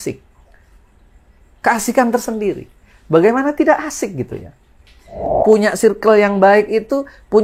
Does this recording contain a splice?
yes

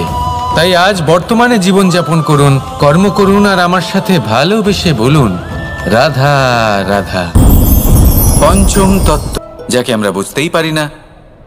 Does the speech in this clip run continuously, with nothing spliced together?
no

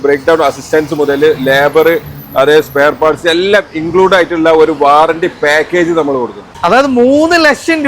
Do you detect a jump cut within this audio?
yes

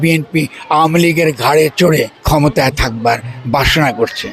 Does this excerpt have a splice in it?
yes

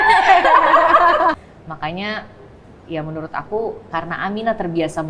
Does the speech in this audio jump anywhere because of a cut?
yes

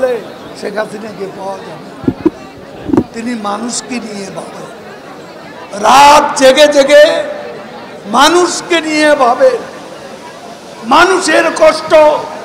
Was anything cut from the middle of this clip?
no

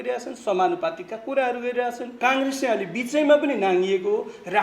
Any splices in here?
yes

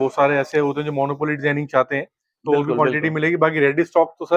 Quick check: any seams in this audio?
no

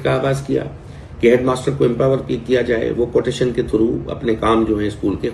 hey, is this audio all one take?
yes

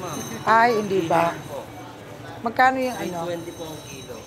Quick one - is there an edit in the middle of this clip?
no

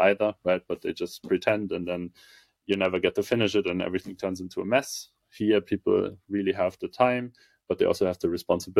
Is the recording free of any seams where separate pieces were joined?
yes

